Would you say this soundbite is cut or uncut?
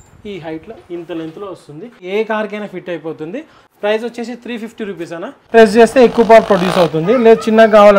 cut